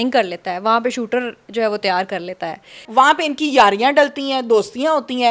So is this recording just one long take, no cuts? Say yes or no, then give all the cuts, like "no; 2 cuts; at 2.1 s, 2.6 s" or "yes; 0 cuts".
no; 1 cut; at 2.8 s